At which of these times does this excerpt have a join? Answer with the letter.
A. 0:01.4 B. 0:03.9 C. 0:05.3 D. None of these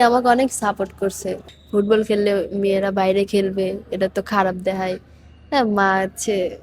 A